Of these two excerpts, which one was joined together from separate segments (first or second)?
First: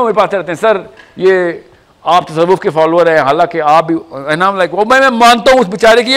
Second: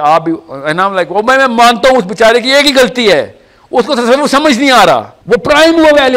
second